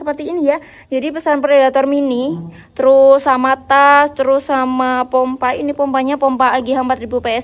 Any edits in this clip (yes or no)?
no